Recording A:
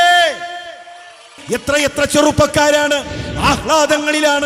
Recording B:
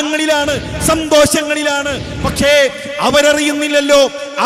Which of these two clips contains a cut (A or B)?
A